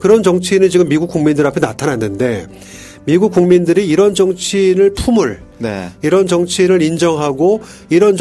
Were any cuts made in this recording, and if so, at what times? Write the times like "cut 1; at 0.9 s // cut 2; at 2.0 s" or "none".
none